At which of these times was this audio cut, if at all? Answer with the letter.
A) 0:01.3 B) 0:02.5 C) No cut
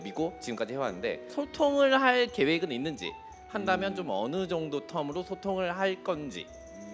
A